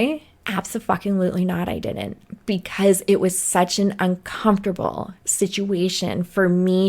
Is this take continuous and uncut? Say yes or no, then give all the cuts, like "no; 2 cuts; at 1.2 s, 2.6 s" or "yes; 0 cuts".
yes; 0 cuts